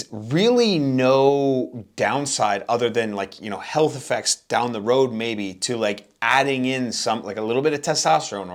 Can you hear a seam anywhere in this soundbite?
no; 0 cuts

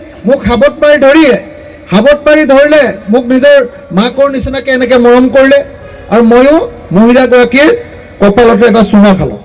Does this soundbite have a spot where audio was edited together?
no; 0 cuts

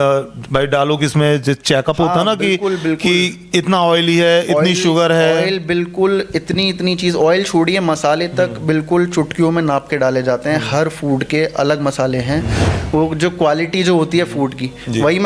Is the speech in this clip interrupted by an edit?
yes; 1 cut; at 12.6 s

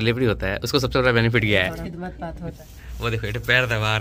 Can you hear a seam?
yes; 1 cut; at 2.5 s

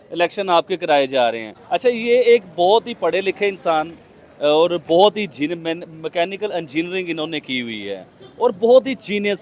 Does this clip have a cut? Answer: yes; 1 cut; at 1.5 s

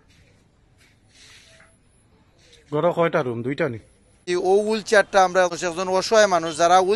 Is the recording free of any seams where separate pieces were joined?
no; 2 cuts; at 4.1 s, 5.5 s

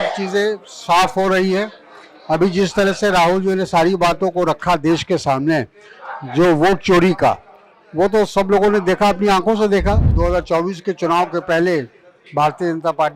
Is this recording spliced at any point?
yes; 1 cut; at 10.1 s

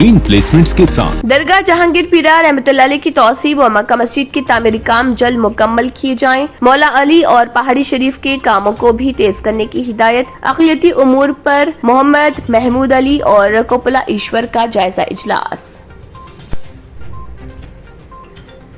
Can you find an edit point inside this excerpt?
yes; 1 cut; at 1.2 s

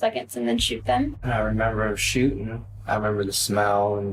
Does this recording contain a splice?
yes; 1 cut; at 1.2 s

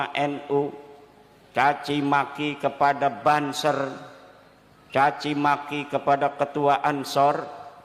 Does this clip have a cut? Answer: no; 0 cuts

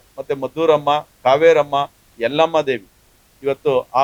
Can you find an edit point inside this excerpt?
no; 0 cuts

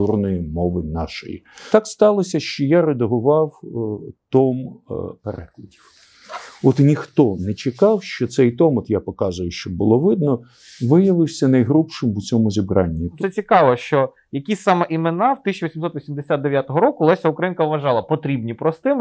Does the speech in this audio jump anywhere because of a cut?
yes; 2 cuts; at 1.6 s, 13.1 s

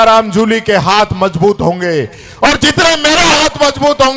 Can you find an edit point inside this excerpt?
no; 0 cuts

